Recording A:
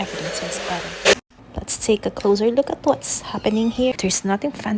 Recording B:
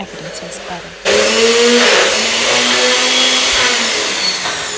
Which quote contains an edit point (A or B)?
A